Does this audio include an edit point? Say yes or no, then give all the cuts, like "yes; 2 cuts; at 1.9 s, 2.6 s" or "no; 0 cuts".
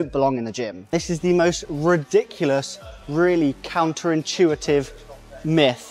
yes; 1 cut; at 0.9 s